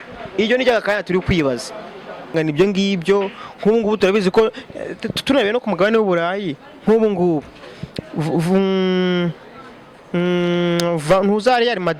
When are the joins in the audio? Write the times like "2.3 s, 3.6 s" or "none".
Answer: 2.3 s